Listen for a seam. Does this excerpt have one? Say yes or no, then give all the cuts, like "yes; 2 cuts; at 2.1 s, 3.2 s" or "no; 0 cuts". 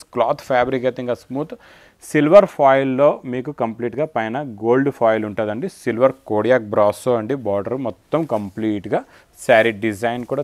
no; 0 cuts